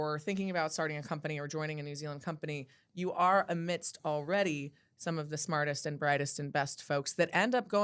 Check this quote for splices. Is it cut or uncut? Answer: uncut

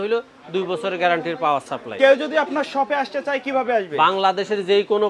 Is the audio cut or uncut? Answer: uncut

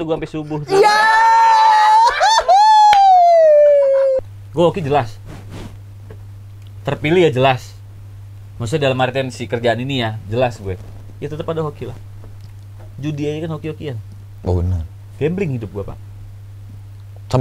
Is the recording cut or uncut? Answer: cut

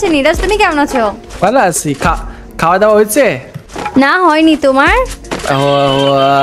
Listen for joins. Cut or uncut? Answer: cut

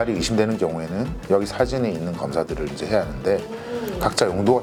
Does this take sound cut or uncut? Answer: uncut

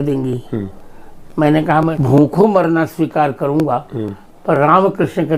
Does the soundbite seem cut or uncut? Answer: cut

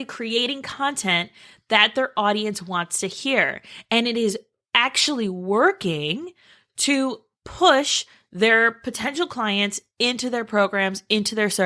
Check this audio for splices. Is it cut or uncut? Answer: uncut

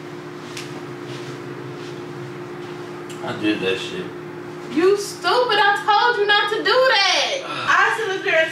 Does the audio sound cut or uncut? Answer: cut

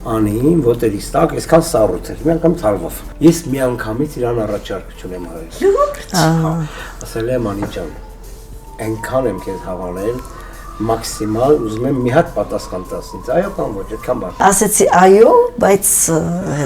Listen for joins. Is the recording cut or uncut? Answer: cut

